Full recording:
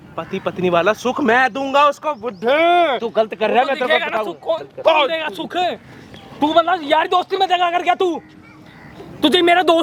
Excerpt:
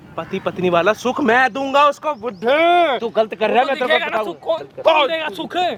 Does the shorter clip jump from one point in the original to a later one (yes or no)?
no